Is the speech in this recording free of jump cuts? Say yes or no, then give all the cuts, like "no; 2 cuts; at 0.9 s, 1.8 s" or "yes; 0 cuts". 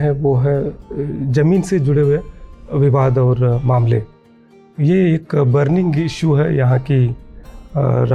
yes; 0 cuts